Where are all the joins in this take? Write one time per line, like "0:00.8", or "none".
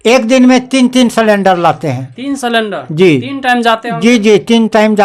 none